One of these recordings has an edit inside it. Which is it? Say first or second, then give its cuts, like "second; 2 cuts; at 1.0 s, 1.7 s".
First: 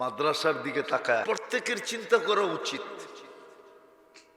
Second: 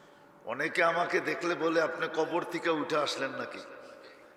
first; 1 cut; at 1.2 s